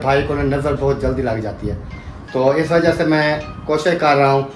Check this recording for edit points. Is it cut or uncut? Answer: uncut